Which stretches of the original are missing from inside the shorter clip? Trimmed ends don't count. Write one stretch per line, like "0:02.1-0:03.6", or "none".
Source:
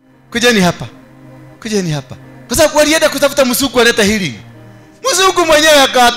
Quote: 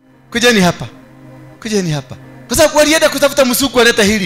none